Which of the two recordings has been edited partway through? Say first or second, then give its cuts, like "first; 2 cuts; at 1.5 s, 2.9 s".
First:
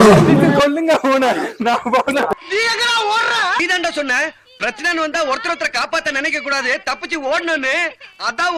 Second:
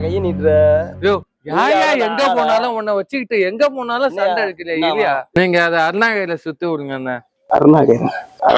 second; 1 cut; at 5.3 s